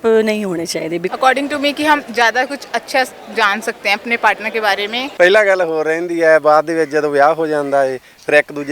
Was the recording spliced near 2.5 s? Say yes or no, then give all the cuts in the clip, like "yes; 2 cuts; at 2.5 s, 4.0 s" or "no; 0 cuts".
no; 2 cuts; at 1.1 s, 5.0 s